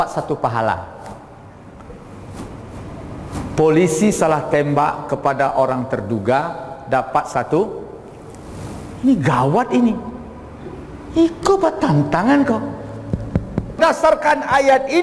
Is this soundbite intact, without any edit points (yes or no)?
no